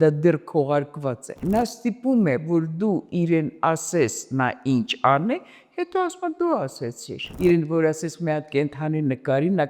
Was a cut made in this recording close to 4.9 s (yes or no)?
no